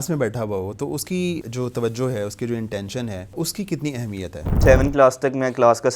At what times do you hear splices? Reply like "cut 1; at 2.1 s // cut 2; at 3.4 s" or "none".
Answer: cut 1; at 1.4 s // cut 2; at 3.3 s // cut 3; at 4.6 s